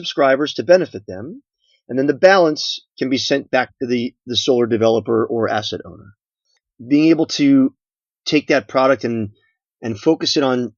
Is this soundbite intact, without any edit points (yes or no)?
no